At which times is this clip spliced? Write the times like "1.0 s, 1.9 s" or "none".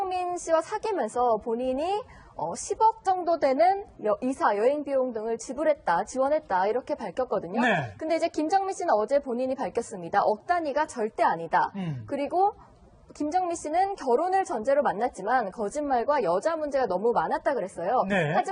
none